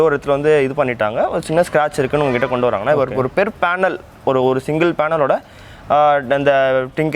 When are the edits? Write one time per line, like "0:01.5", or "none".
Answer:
none